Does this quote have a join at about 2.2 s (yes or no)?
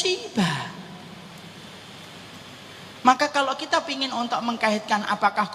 no